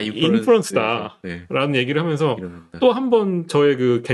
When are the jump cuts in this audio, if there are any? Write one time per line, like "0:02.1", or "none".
none